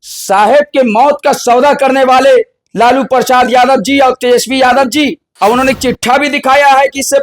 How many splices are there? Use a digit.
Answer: 1